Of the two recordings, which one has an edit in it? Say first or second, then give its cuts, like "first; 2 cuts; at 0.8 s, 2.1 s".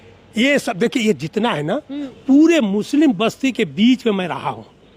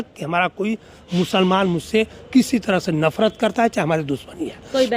first; 1 cut; at 2.0 s